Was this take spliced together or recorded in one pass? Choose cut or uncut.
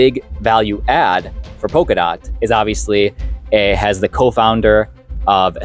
uncut